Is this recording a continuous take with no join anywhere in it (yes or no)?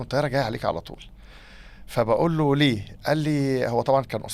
yes